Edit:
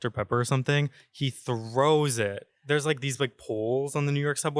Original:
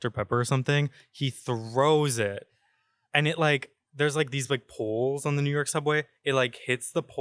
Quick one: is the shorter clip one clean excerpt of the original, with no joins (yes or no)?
no